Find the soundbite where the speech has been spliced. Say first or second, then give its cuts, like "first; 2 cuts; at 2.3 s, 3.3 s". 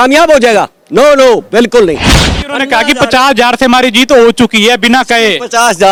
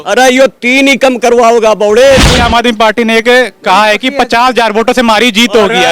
second; 1 cut; at 2.3 s